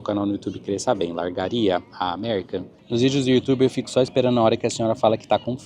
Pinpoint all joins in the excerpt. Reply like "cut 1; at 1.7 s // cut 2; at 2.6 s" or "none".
cut 1; at 2.8 s